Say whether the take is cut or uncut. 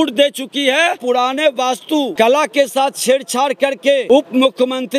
cut